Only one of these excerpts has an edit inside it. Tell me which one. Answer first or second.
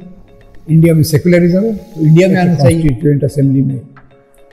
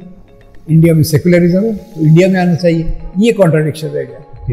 first